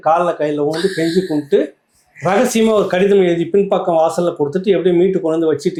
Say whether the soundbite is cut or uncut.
uncut